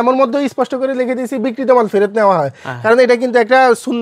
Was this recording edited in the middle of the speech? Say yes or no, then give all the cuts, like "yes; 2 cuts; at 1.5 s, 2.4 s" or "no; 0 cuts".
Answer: no; 0 cuts